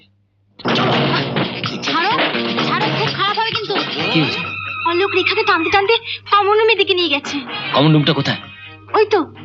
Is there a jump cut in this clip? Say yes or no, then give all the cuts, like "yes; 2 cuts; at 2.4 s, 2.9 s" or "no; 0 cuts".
yes; 1 cut; at 4.1 s